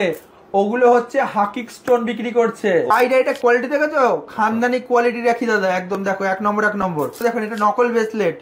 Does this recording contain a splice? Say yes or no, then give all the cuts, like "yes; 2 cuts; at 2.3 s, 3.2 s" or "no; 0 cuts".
yes; 2 cuts; at 2.9 s, 7.2 s